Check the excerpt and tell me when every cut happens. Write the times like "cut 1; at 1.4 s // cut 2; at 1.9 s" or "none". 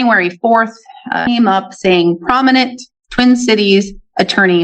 cut 1; at 1.2 s